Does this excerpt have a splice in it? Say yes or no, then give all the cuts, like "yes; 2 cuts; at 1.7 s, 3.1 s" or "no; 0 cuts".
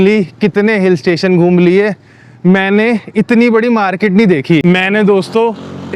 yes; 1 cut; at 4.6 s